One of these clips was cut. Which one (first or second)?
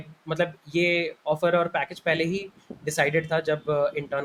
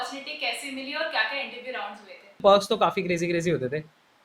second